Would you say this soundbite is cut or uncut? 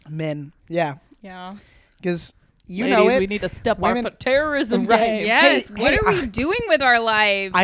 uncut